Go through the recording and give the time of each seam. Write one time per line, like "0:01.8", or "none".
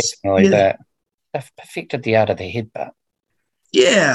0:01.1